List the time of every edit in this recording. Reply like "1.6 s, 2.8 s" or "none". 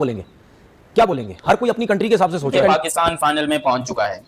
2.6 s